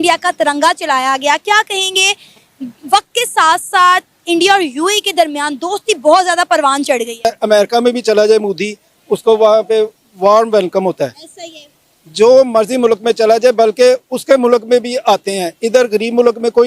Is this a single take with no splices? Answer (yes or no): no